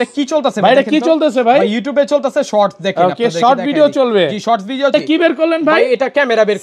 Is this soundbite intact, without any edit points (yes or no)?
no